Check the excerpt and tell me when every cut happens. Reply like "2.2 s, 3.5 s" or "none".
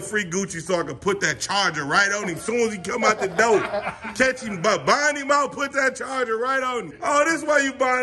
6.9 s